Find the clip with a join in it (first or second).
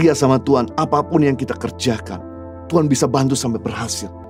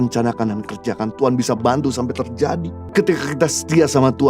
second